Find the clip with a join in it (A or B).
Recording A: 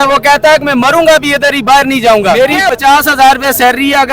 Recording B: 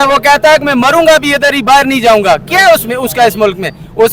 A